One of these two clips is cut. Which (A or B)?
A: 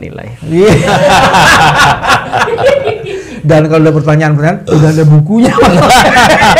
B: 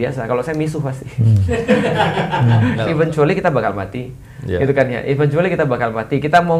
B